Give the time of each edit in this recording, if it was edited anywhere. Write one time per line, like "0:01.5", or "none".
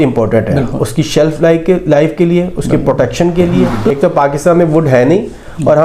0:03.9